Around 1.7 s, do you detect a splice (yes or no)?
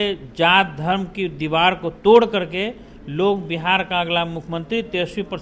no